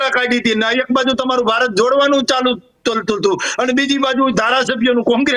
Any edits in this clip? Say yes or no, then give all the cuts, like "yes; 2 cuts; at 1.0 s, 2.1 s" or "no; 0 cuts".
no; 0 cuts